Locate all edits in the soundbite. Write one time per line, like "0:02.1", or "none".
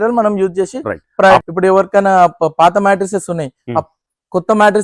0:01.4